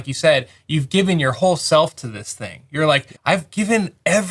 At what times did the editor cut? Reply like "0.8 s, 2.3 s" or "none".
3.1 s